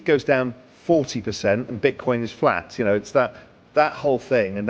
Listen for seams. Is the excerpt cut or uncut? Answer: uncut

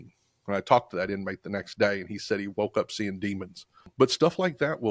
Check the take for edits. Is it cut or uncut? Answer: cut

